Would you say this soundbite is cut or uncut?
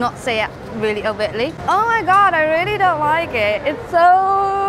uncut